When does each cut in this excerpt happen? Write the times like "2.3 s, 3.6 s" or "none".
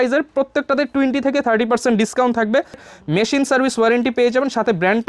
2.9 s